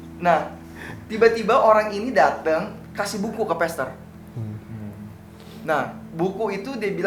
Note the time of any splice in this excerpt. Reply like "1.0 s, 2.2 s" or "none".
none